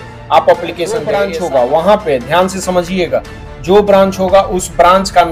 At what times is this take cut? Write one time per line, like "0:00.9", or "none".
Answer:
0:01.1